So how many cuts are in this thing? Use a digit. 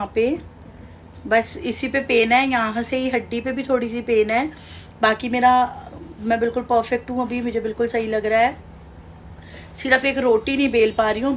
0